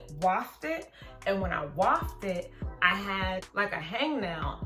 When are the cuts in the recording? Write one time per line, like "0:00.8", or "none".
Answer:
0:02.6
0:03.5